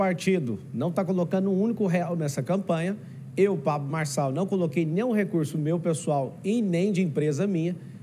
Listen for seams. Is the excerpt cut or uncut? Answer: uncut